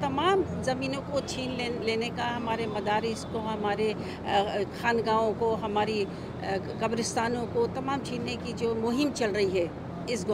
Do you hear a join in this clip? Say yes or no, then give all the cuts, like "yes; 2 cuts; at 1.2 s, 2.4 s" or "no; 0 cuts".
no; 0 cuts